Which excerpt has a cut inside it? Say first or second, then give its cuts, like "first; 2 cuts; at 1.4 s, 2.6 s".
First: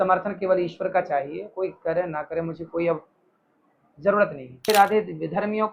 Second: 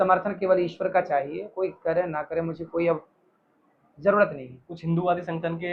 first; 1 cut; at 4.7 s